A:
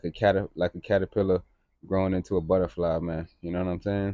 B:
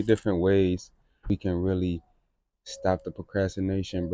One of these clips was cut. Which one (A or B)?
B